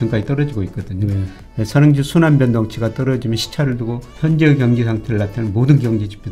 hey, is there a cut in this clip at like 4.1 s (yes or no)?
yes